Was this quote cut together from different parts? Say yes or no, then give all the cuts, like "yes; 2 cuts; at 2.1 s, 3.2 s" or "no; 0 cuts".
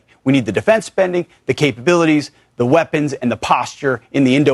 no; 0 cuts